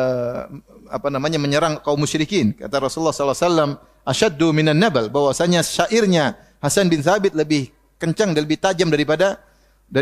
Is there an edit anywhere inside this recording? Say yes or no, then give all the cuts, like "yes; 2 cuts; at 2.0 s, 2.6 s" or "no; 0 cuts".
no; 0 cuts